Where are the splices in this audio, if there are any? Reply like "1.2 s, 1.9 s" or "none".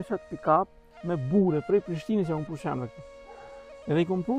none